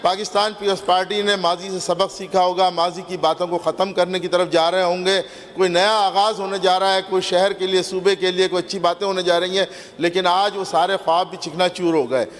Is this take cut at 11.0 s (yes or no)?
no